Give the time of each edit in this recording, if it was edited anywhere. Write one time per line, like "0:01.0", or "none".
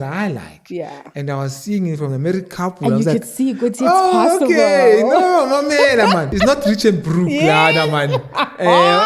0:06.3